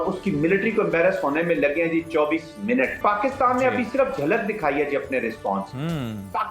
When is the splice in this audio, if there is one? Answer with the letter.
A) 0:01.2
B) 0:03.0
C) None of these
B